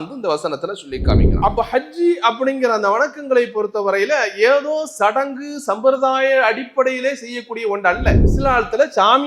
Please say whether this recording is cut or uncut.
cut